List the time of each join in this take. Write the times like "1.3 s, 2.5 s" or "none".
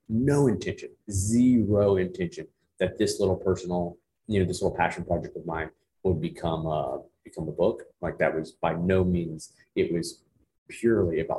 none